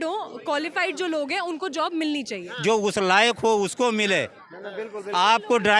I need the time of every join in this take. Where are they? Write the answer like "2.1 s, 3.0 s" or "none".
2.5 s